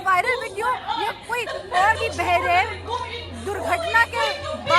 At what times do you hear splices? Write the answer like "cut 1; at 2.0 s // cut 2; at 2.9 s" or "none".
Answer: none